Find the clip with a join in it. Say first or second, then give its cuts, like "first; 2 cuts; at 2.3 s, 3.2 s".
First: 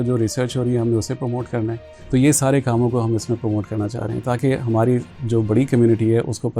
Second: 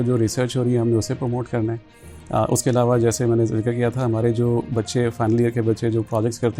first; 1 cut; at 1.9 s